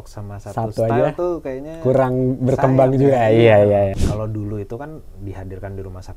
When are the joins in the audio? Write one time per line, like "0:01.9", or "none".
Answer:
0:04.0